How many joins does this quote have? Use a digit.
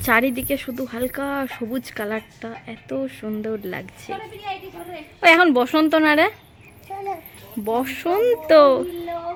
0